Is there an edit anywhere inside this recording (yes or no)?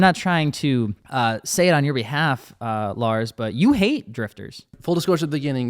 yes